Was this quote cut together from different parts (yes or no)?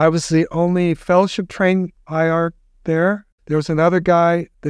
no